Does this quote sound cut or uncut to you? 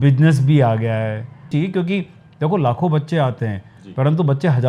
cut